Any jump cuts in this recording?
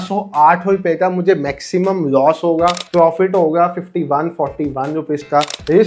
no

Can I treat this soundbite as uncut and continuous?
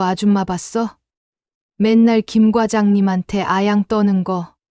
yes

